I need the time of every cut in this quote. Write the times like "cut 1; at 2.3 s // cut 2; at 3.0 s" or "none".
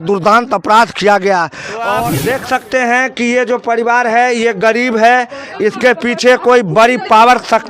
cut 1; at 2.0 s